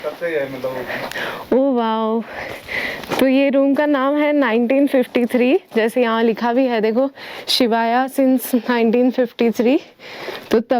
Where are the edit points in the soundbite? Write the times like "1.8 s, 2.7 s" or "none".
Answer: none